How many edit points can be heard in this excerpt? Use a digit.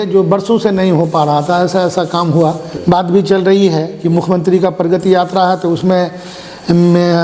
1